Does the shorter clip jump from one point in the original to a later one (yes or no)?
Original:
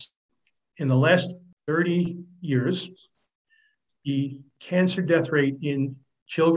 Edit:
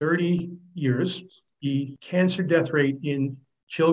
yes